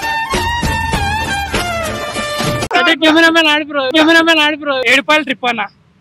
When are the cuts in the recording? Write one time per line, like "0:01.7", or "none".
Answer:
0:02.7
0:04.8